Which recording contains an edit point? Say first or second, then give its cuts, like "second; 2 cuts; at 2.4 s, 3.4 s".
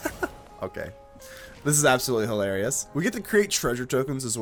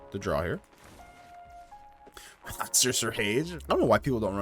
second; 1 cut; at 3.5 s